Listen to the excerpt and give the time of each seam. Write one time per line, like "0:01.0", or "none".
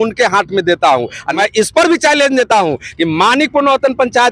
0:01.3

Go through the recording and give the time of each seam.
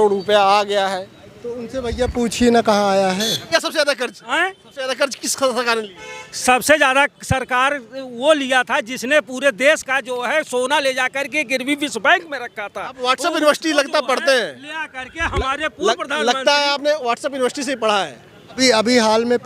0:03.5
0:18.5

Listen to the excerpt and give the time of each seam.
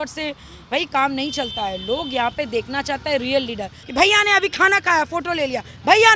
0:03.8

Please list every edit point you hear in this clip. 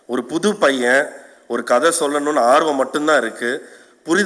none

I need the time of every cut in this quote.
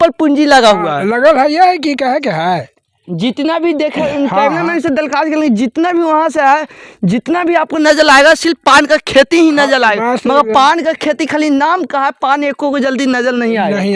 none

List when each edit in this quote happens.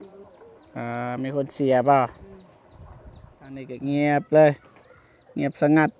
0:03.7

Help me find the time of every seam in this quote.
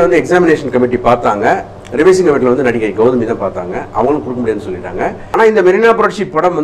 0:01.8
0:05.2

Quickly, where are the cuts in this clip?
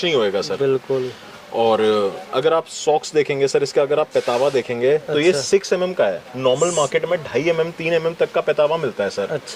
none

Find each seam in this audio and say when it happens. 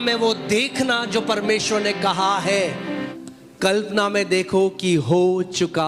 0:03.1

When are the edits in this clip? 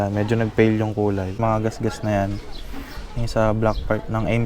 0:01.3

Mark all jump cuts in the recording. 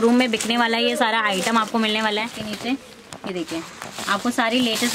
0:02.4

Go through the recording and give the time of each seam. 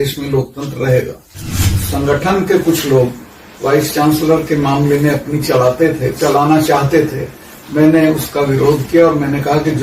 0:01.8

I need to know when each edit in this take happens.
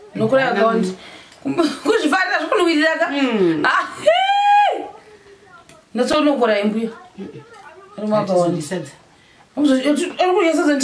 none

